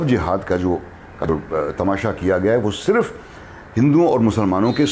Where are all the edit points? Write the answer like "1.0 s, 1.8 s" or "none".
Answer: 1.2 s